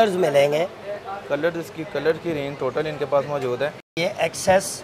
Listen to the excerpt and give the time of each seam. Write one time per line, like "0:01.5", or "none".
0:03.9

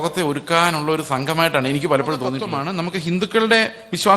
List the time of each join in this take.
0:02.5

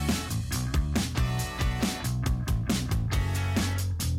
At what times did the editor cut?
0:02.4

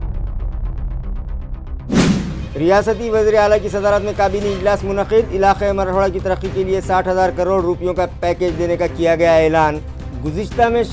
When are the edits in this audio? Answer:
none

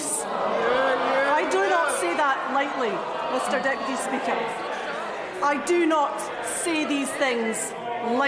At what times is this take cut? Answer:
none

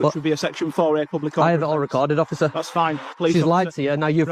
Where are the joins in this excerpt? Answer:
0:03.1

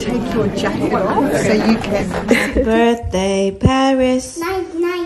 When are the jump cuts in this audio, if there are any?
0:02.4

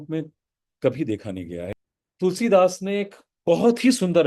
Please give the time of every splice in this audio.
0:01.6

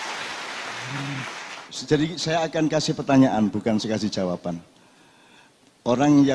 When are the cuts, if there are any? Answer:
0:01.7

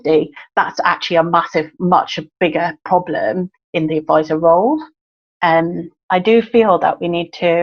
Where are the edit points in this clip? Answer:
0:03.6
0:05.9

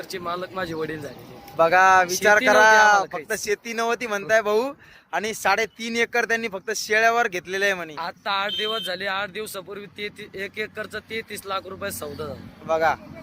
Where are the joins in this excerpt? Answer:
none

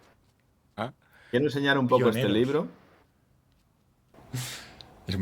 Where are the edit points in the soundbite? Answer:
0:04.0

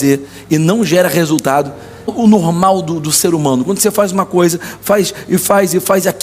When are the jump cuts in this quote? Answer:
0:02.1

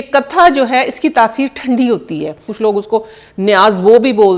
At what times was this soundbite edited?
0:02.5

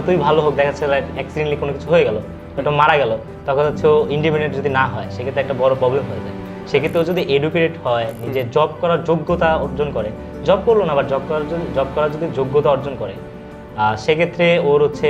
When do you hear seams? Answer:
none

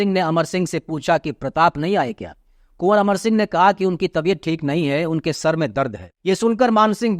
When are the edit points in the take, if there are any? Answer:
0:06.1

